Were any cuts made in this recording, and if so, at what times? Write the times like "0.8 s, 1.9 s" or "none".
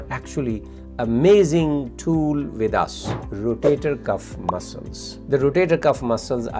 3.1 s